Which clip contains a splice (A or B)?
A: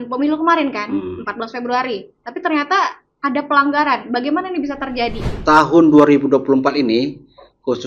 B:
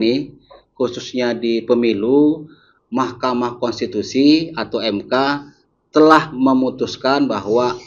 A